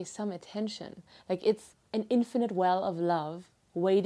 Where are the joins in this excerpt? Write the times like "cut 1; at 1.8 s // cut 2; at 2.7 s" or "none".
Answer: cut 1; at 1.7 s